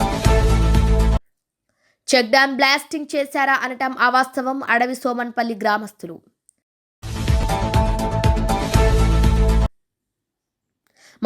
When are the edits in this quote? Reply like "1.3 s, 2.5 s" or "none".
1.2 s